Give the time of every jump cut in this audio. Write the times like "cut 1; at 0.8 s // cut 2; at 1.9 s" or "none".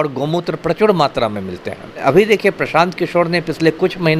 cut 1; at 2.0 s